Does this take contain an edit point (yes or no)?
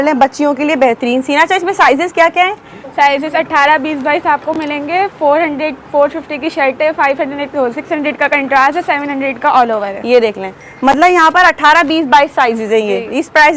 no